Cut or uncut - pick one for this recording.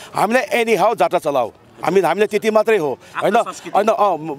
uncut